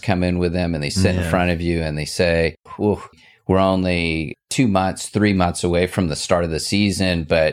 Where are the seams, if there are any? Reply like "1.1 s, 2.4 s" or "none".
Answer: 2.9 s, 4.3 s